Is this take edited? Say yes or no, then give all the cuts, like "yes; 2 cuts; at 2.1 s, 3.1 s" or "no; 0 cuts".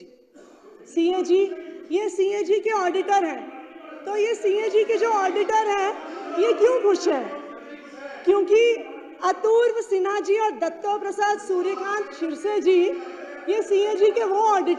no; 0 cuts